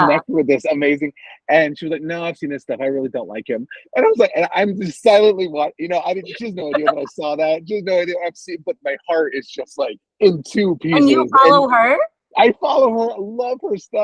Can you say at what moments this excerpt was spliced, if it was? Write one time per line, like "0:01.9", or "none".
0:10.0
0:12.2